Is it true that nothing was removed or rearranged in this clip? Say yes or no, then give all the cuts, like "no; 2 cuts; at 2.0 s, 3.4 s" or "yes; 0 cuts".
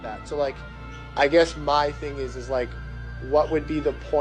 no; 1 cut; at 1.7 s